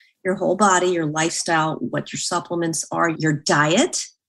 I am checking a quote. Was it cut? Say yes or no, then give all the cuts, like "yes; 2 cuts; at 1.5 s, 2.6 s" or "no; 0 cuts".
yes; 1 cut; at 3.2 s